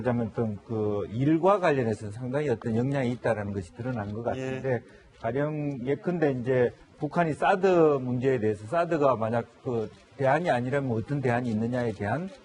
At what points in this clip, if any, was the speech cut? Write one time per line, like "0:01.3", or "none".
0:07.0